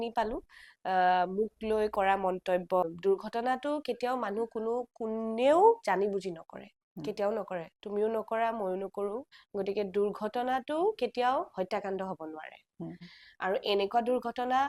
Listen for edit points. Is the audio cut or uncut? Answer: cut